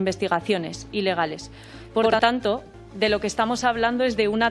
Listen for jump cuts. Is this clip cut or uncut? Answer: cut